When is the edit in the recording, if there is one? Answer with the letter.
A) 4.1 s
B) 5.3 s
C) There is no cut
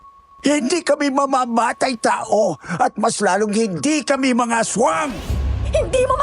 B